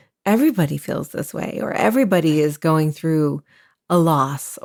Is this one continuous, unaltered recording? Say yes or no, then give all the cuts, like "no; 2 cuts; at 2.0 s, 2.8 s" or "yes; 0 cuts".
yes; 0 cuts